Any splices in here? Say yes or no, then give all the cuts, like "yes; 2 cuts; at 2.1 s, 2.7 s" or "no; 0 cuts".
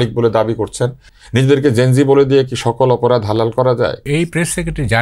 yes; 2 cuts; at 1.0 s, 4.0 s